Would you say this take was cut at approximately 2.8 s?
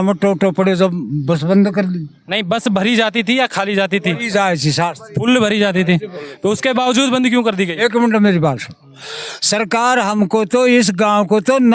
no; 0 cuts

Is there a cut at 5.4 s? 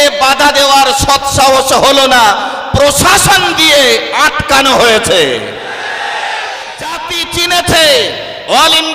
no; 1 cut; at 7.1 s

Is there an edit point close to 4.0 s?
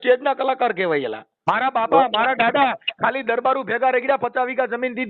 no; 1 cut; at 1.2 s

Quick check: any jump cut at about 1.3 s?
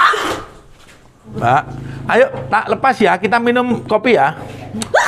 yes; 1 cut; at 1.3 s

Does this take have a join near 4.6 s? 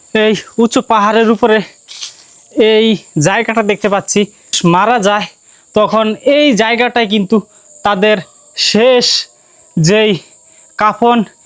yes; 1 cut; at 4.6 s

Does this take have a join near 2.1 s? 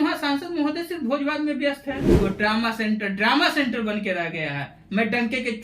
yes; 1 cut; at 2.1 s

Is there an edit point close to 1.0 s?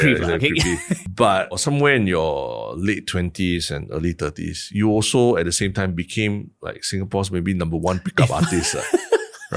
yes; 2 cuts; at 1.0 s, 1.6 s

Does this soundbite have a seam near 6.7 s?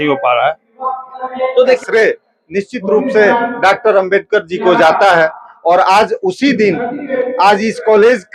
no; 1 cut; at 1.8 s

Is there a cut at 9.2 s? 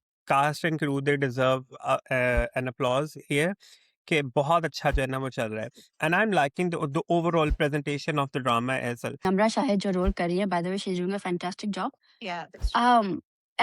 yes; 1 cut; at 9.2 s

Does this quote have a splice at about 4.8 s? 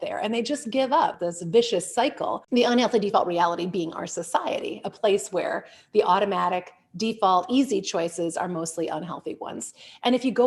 no; 2 cuts; at 1.3 s, 2.4 s

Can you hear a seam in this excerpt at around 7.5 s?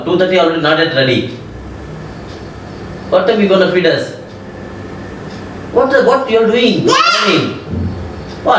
yes; 1 cut; at 7.5 s

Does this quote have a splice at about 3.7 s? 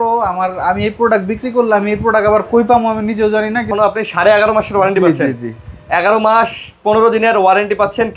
yes; 1 cut; at 3.7 s

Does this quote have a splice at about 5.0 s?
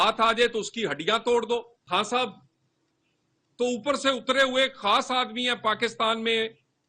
no; 1 cut; at 1.8 s

